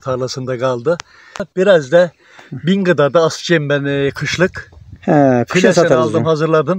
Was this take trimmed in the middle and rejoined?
yes; 1 cut; at 1.5 s

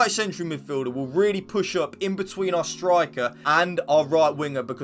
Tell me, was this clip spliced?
yes; 1 cut; at 3.3 s

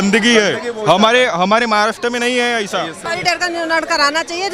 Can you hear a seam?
yes; 1 cut; at 3.0 s

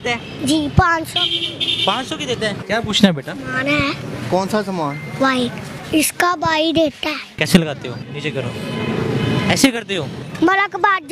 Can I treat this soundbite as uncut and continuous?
no; 4 cuts; at 2.6 s, 5.7 s, 7.3 s, 10.2 s

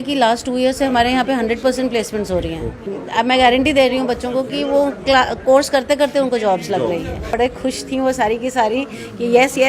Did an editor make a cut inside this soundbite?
yes; 2 cuts; at 2.9 s, 7.2 s

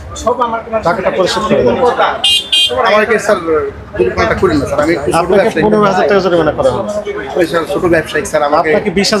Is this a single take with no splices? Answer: yes; 0 cuts

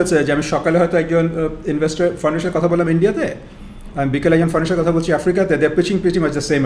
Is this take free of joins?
yes; 0 cuts

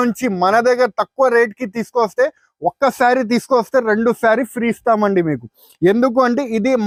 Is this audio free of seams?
yes; 0 cuts

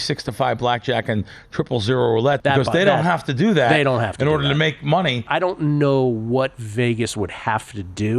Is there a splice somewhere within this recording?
yes; 2 cuts; at 2.4 s, 5.2 s

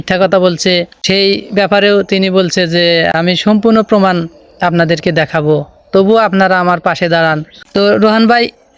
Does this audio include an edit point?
yes; 3 cuts; at 0.9 s, 3.1 s, 7.5 s

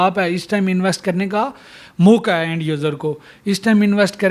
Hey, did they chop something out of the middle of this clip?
no; 0 cuts

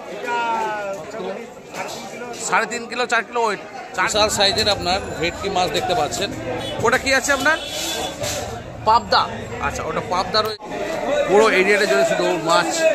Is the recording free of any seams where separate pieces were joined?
no; 2 cuts; at 4.1 s, 10.5 s

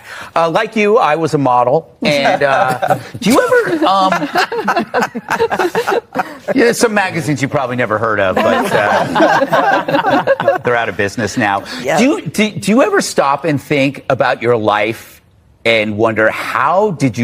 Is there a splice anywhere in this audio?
no; 0 cuts

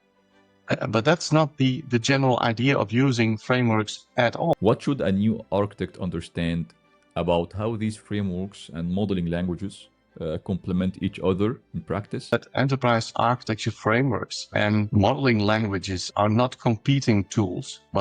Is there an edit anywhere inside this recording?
yes; 2 cuts; at 4.5 s, 12.3 s

